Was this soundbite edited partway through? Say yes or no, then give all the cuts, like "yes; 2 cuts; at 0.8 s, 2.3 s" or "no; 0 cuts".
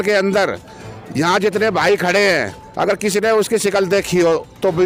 no; 0 cuts